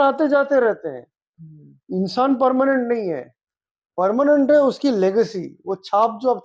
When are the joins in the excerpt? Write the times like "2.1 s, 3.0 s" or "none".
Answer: none